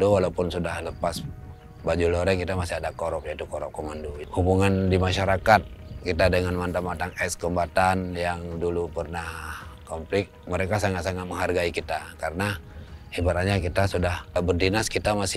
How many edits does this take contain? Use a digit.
1